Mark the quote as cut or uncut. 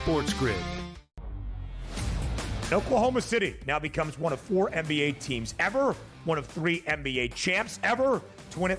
cut